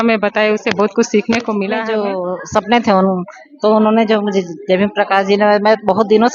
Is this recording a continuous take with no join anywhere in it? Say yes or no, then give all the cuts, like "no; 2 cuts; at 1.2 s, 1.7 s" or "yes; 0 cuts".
no; 1 cut; at 1.8 s